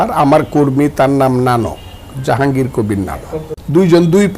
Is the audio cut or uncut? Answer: cut